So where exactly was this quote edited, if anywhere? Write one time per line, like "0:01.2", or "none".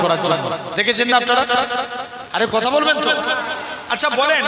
none